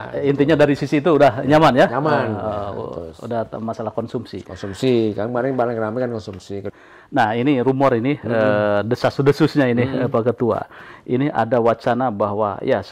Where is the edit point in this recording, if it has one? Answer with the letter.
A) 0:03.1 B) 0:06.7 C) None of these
B